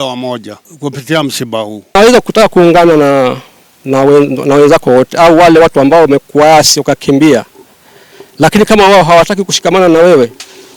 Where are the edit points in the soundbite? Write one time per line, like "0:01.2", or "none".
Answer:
0:01.8